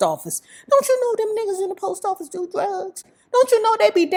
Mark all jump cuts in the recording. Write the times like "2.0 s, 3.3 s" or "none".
none